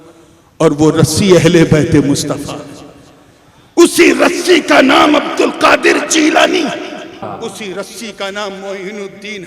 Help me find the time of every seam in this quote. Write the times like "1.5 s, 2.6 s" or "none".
7.3 s

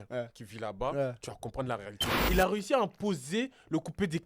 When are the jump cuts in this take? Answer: 2.2 s

